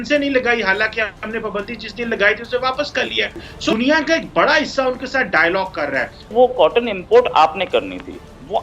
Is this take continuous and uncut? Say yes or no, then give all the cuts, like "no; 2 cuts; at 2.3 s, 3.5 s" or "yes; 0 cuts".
no; 2 cuts; at 3.7 s, 6.3 s